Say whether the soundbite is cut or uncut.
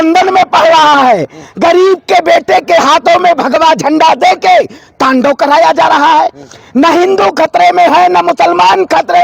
uncut